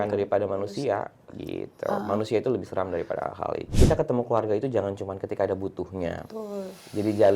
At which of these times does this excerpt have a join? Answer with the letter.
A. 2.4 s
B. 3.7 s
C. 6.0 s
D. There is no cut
B